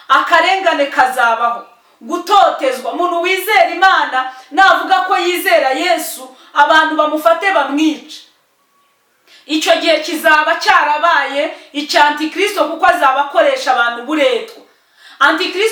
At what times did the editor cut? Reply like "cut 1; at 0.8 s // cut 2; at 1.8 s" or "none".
none